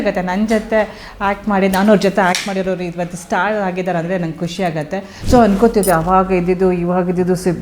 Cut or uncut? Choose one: cut